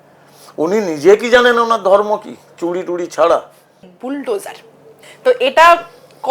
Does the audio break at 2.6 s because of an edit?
no; 1 cut; at 3.9 s

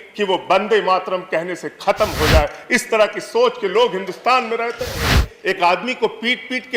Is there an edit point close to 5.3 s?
yes; 1 cut; at 5.3 s

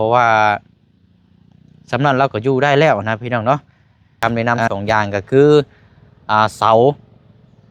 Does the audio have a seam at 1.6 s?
no; 1 cut; at 4.1 s

